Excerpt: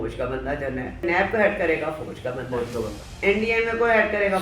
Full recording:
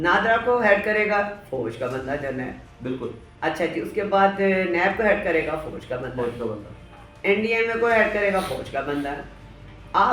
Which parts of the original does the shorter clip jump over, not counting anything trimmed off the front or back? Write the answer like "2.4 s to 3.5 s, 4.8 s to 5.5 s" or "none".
2.6 s to 4.7 s, 6.7 s to 7.1 s